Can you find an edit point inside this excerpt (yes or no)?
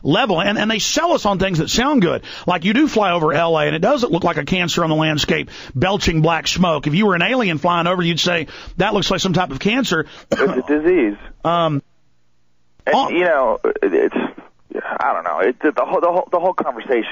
yes